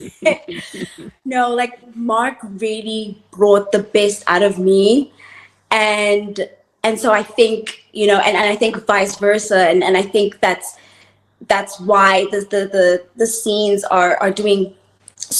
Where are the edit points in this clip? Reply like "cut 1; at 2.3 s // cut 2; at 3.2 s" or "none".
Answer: none